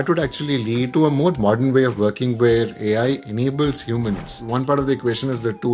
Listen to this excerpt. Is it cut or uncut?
cut